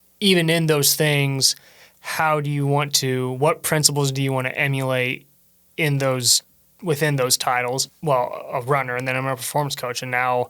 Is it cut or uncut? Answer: cut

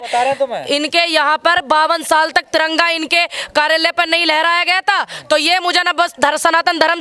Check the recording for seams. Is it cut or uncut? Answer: uncut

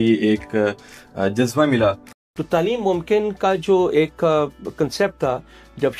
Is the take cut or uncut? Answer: cut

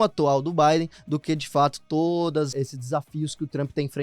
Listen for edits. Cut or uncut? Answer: cut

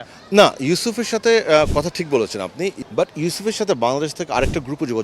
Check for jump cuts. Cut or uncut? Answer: cut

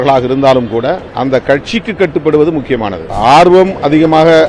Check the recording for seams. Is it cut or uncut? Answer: cut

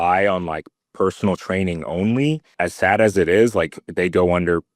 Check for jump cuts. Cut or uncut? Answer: cut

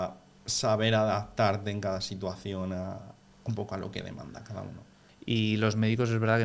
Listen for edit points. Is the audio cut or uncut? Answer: cut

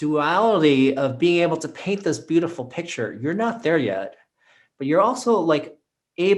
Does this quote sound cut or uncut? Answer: uncut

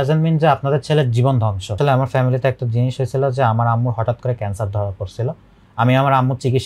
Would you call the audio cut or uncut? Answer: cut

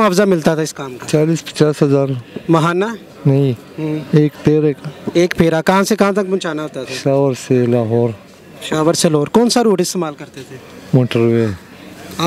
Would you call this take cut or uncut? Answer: uncut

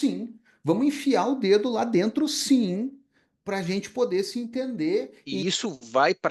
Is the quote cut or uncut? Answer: cut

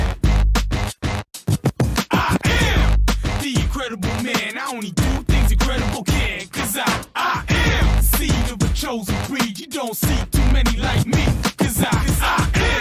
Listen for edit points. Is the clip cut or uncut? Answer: cut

